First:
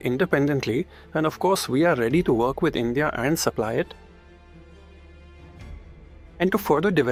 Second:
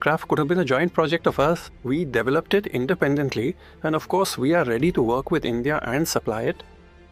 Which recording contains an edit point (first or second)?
second